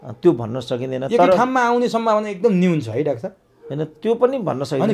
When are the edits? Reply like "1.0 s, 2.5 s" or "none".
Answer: none